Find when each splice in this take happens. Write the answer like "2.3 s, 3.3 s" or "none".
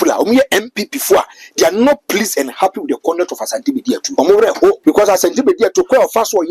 4.1 s, 4.8 s